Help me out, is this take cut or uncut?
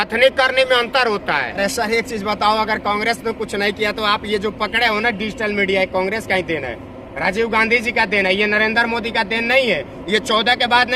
cut